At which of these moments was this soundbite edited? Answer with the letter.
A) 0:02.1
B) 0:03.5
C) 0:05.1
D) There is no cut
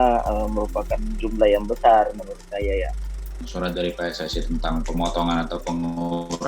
B